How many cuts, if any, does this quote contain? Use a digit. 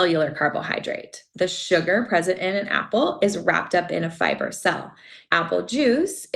2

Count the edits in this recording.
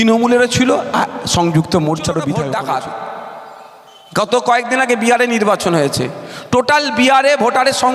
1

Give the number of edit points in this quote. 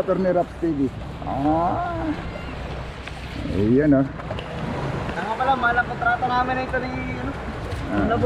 0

